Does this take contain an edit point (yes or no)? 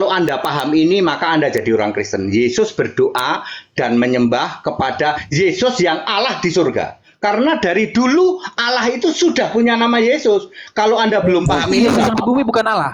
no